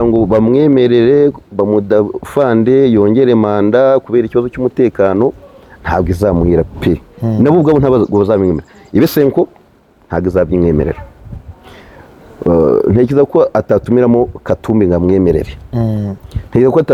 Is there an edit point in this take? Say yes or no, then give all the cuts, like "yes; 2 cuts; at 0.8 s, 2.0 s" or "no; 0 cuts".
no; 0 cuts